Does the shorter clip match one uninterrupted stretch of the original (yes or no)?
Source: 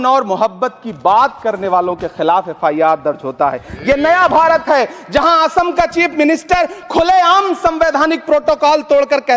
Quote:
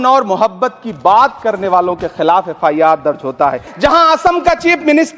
no